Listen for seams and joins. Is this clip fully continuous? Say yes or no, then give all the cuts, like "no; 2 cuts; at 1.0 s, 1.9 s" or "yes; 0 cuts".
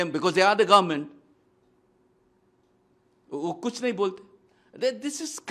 yes; 0 cuts